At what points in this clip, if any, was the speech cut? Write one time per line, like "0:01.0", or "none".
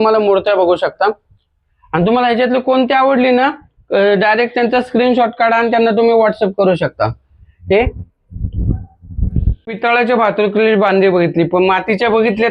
none

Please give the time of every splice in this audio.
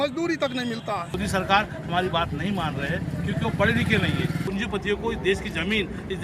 0:01.2
0:04.5

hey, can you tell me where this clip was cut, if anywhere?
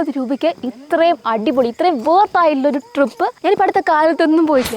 0:03.4

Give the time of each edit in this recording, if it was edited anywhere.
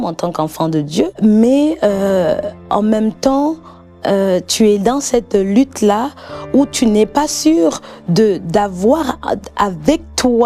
0:01.2

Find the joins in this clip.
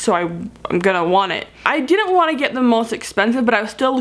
0:01.6

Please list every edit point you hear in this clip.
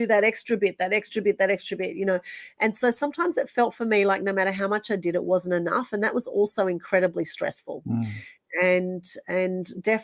none

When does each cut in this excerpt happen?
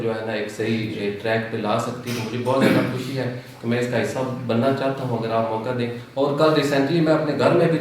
none

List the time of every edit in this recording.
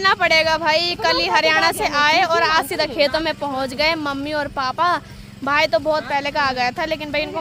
none

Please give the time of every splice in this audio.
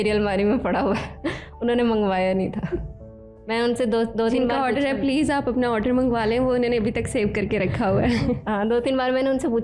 none

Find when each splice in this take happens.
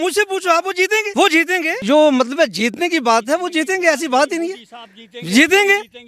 0:01.1
0:01.7

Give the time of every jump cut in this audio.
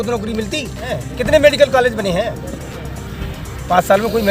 0:01.1

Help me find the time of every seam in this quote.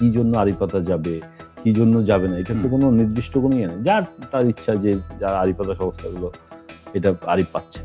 none

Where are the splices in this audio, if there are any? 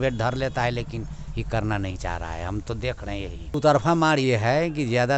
0:03.5

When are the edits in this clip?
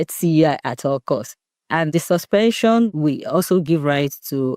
0:01.9
0:02.9

